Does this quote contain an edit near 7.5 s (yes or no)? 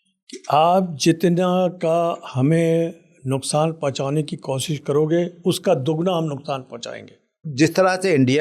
yes